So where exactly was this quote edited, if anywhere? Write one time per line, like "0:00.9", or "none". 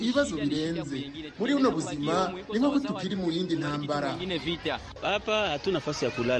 none